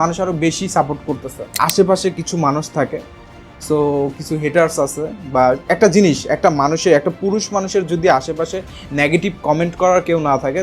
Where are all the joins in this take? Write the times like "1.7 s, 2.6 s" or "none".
1.6 s